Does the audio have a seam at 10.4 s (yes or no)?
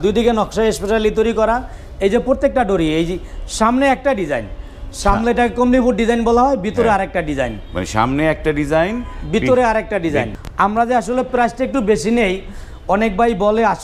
yes